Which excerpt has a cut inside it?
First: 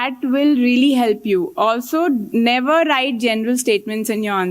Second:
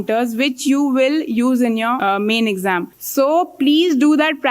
second; 2 cuts; at 2.0 s, 3.0 s

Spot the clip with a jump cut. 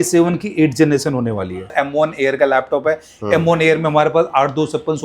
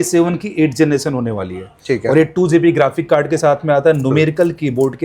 first; 1 cut; at 1.7 s

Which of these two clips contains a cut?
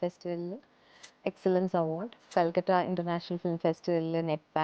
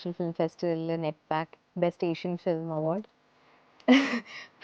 first; 1 cut; at 2.3 s

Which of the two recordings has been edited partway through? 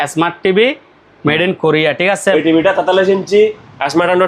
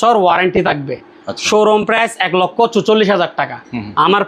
first; 1 cut; at 2.3 s

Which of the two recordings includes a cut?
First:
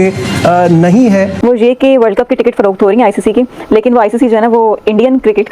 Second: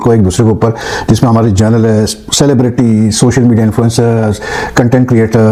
first; 1 cut; at 1.4 s

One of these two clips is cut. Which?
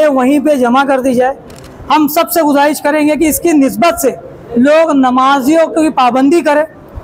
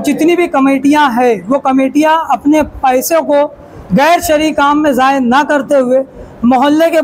first; 1 cut; at 1.6 s

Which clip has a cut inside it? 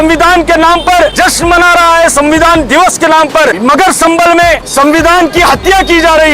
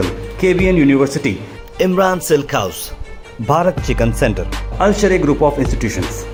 first; 3 cuts; at 1.1 s, 3.5 s, 4.7 s

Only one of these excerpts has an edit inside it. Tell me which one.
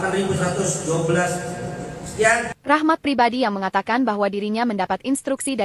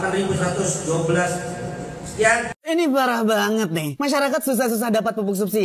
first; 1 cut; at 2.5 s

